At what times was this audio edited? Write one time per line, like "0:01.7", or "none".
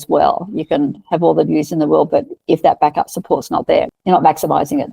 0:04.0